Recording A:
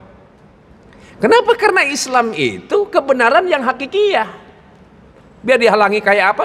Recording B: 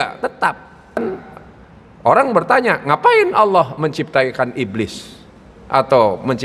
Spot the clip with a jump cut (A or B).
B